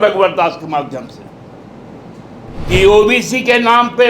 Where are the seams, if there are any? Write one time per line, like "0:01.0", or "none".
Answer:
0:02.7